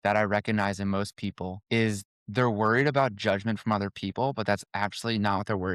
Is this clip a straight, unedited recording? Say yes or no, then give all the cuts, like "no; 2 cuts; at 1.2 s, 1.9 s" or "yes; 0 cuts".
yes; 0 cuts